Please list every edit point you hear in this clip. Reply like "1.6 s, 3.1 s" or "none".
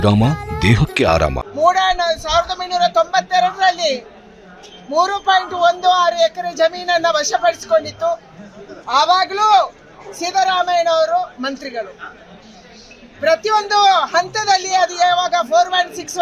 1.4 s